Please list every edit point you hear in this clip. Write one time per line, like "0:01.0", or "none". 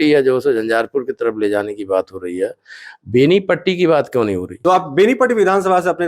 0:04.5